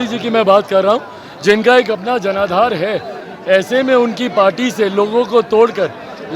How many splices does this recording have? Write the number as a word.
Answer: zero